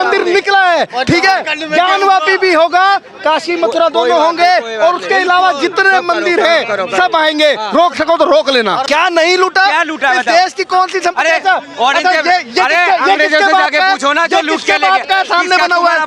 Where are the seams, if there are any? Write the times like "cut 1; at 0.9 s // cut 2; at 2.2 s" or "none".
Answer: cut 1; at 8.8 s